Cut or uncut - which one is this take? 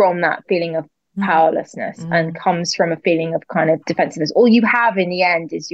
uncut